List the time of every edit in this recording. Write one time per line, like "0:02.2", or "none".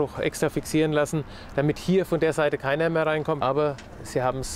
0:03.4